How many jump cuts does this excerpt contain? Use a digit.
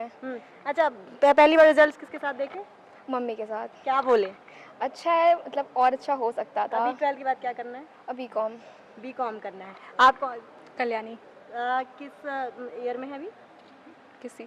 0